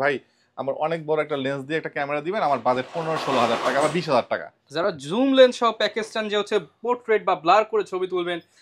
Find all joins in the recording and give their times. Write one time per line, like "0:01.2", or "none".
none